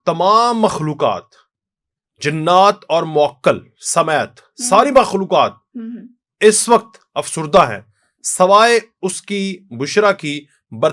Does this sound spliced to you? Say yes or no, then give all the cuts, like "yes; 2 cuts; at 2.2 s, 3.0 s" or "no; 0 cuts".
no; 0 cuts